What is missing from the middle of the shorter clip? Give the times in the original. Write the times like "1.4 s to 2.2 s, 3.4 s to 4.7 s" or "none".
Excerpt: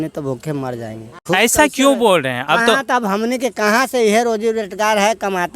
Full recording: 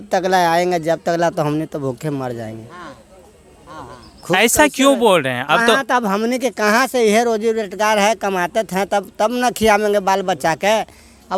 2.6 s to 4.1 s